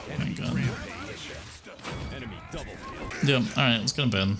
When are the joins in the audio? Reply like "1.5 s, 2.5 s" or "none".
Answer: 3.1 s